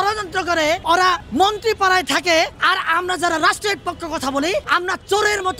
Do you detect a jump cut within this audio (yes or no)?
yes